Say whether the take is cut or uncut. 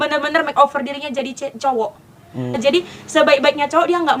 cut